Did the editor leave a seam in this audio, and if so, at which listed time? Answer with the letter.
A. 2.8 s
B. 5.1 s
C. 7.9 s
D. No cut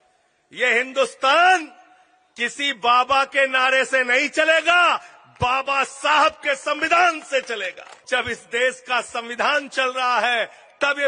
C